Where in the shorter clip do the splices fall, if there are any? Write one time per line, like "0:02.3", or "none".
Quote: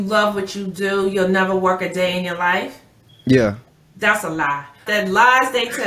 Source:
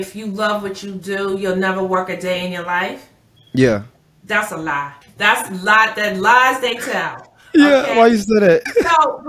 0:04.8